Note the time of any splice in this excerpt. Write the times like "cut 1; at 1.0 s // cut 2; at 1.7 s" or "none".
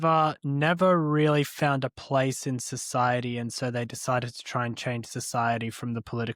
none

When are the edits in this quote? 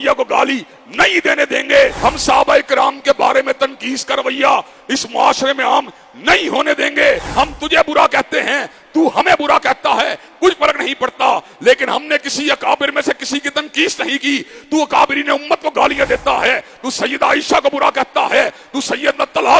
cut 1; at 2.0 s // cut 2; at 7.3 s

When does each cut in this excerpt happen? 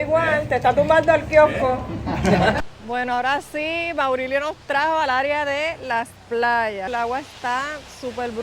cut 1; at 2.6 s // cut 2; at 6.9 s

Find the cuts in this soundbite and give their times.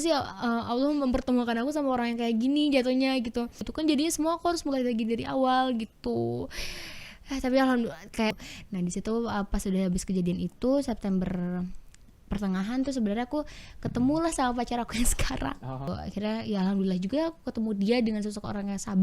cut 1; at 3.7 s // cut 2; at 8.5 s // cut 3; at 16.0 s

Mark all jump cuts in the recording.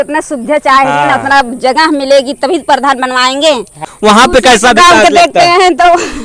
cut 1; at 3.9 s

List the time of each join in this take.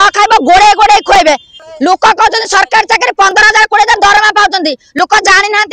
cut 1; at 1.5 s

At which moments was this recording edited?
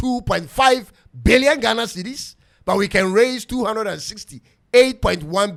none

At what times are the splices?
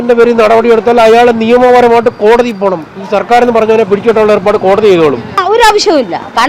cut 1; at 5.3 s

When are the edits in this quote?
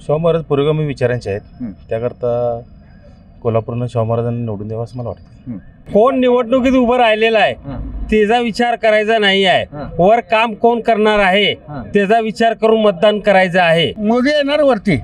cut 1; at 5.8 s // cut 2; at 14.0 s

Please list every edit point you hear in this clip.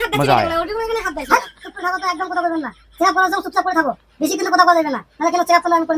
none

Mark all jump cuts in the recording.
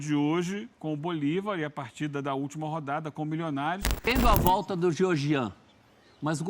cut 1; at 4.1 s

